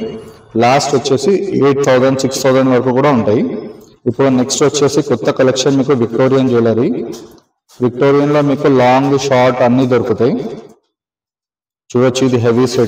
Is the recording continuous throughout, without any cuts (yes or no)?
yes